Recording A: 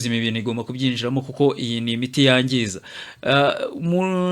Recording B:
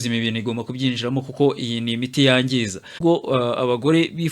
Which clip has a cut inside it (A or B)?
B